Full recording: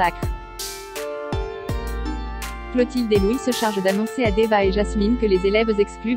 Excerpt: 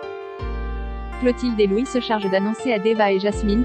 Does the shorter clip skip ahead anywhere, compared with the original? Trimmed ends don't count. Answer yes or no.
no